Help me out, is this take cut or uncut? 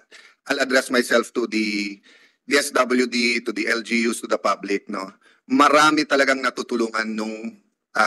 uncut